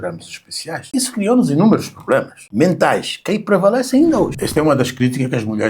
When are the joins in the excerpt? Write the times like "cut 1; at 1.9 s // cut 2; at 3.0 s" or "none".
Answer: cut 1; at 0.8 s // cut 2; at 2.4 s // cut 3; at 4.3 s